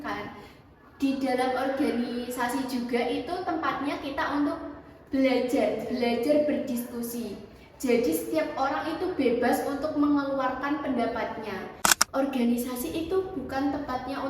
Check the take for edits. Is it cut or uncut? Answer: cut